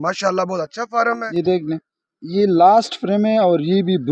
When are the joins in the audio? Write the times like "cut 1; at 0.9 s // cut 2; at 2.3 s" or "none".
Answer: cut 1; at 1.2 s